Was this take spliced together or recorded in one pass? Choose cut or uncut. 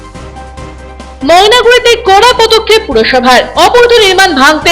uncut